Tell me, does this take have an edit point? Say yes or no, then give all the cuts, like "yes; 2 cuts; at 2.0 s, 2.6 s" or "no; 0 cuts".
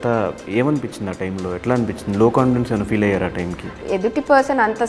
yes; 1 cut; at 3.8 s